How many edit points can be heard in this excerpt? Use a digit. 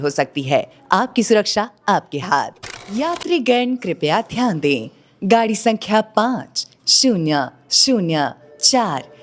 1